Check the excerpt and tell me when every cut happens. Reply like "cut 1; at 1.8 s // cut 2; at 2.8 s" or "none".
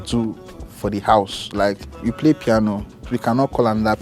cut 1; at 2.0 s // cut 2; at 3.1 s